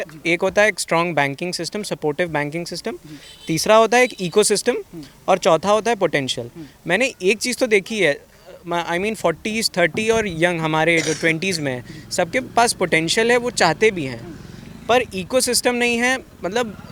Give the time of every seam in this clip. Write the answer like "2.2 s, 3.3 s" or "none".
none